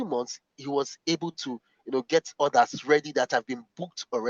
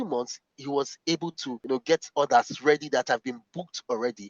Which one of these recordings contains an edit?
second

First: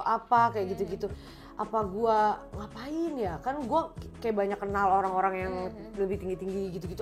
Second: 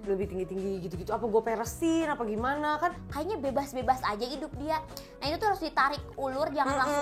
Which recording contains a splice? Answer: second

